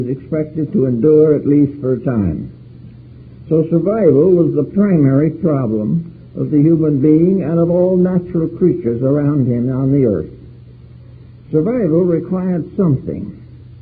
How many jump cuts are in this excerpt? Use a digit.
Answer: 1